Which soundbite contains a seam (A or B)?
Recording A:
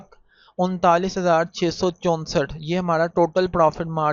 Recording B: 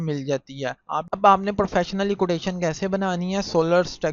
B